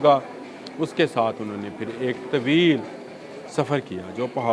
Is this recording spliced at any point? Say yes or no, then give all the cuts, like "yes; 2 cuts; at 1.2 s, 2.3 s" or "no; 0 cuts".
no; 0 cuts